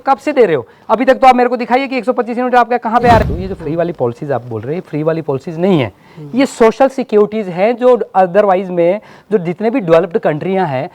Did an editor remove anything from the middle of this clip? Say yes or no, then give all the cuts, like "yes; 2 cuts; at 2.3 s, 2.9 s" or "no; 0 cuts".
yes; 1 cut; at 3.2 s